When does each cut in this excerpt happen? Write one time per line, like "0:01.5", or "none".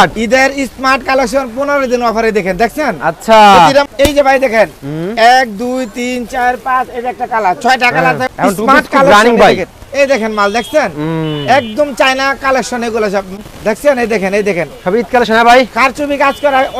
0:03.9
0:08.3
0:13.4